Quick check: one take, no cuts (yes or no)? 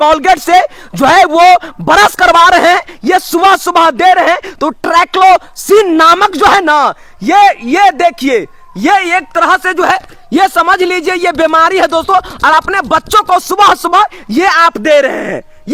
yes